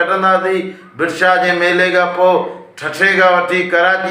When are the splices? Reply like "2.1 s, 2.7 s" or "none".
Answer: none